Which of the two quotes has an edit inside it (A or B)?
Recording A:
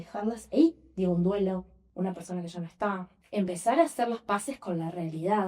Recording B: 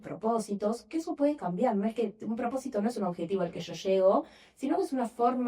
A